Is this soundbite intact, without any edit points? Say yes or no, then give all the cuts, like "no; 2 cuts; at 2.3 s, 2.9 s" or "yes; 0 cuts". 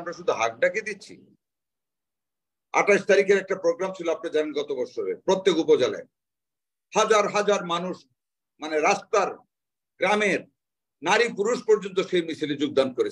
yes; 0 cuts